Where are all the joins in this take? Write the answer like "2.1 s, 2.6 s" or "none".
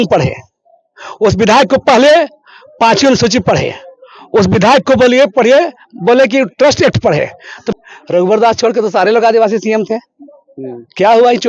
7.6 s